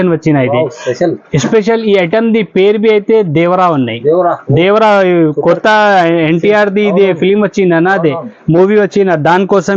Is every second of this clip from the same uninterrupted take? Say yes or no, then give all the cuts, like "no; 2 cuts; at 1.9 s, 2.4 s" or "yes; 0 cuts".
yes; 0 cuts